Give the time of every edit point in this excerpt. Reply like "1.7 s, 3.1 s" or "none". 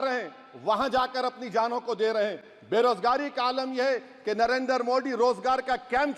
none